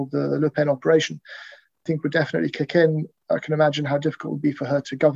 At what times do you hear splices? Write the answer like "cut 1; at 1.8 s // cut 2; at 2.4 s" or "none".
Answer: cut 1; at 1.8 s